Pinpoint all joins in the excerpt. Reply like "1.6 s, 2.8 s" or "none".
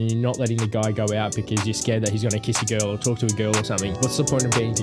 3.9 s